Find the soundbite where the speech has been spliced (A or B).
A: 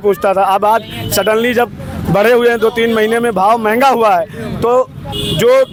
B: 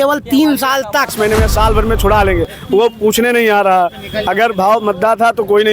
B